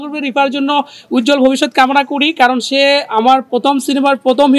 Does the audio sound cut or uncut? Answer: uncut